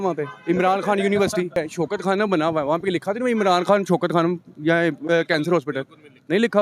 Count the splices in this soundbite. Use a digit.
1